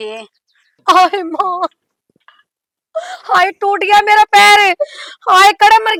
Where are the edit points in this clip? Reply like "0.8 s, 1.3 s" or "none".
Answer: none